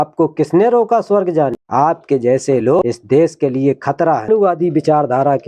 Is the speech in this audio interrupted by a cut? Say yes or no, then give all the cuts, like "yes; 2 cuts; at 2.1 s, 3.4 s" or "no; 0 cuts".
yes; 3 cuts; at 1.6 s, 2.8 s, 4.3 s